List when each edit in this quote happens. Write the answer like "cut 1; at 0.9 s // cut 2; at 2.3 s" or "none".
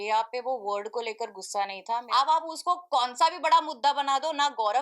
cut 1; at 2.1 s

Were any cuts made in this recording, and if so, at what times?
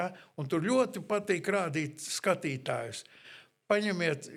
none

